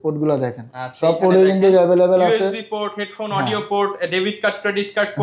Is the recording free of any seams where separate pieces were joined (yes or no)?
yes